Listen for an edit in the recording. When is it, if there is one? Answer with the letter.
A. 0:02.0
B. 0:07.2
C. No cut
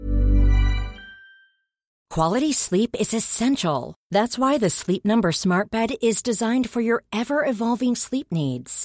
A